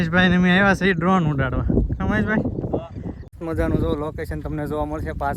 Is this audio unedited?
no; 1 cut; at 3.3 s

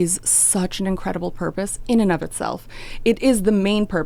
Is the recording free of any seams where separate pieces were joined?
yes; 0 cuts

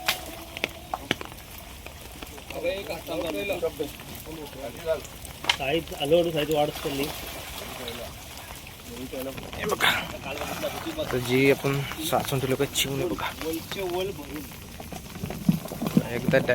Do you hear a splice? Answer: yes; 1 cut; at 9.3 s

